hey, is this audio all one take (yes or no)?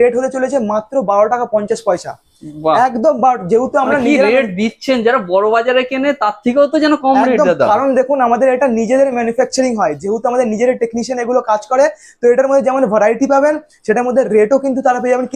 yes